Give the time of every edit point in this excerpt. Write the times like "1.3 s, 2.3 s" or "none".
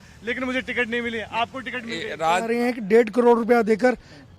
2.5 s